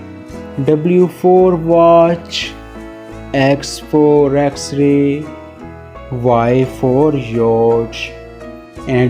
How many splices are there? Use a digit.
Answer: 0